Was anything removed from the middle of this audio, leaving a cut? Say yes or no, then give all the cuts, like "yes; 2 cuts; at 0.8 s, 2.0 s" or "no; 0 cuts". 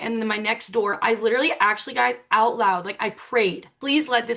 no; 0 cuts